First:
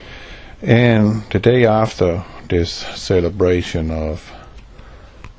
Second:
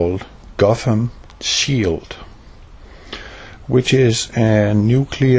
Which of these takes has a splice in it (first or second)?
second